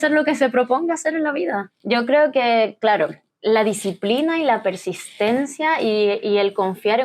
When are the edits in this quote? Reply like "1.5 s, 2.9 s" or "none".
1.7 s, 3.3 s